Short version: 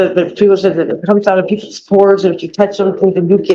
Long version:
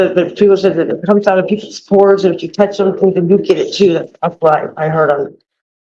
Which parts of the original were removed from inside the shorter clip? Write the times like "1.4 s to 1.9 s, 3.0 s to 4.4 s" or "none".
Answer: none